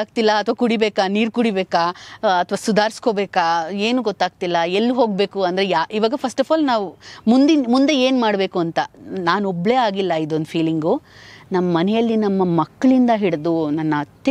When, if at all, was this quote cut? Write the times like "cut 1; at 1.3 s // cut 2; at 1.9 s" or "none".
none